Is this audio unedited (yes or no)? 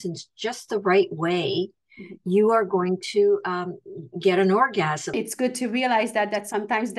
no